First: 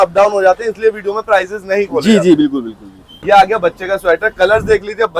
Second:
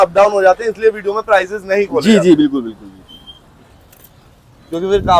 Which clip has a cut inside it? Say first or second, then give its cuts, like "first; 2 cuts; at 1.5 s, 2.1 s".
first; 1 cut; at 3.1 s